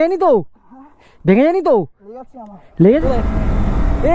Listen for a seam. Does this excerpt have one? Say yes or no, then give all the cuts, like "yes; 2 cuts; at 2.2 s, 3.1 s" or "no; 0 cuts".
yes; 1 cut; at 3.0 s